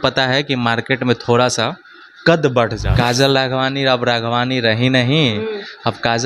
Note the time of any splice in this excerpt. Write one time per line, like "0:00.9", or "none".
0:02.8